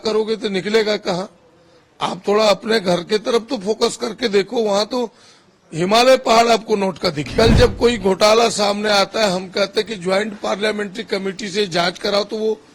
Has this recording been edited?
yes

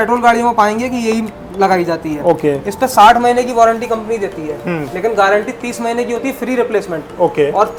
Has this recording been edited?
no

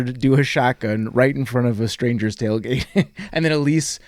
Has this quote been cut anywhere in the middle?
no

